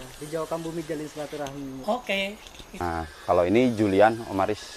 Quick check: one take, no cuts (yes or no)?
no